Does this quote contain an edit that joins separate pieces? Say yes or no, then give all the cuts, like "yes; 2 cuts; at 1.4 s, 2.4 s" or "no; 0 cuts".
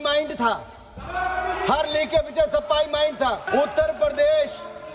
yes; 1 cut; at 3.4 s